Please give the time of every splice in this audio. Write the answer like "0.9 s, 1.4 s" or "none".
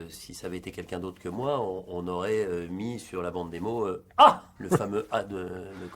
4.5 s